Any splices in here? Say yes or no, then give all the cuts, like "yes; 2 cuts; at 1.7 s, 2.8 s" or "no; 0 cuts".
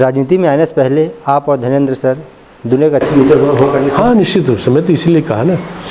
no; 0 cuts